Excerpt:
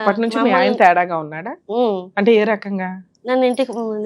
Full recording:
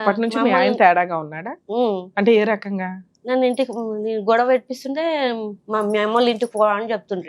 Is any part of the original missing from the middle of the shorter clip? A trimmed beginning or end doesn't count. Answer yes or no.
no